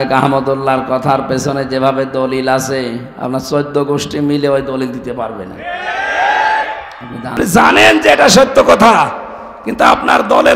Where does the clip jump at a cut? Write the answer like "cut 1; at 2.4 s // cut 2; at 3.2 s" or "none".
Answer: cut 1; at 7.4 s